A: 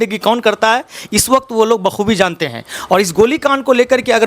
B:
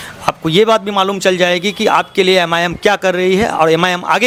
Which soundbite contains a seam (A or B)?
A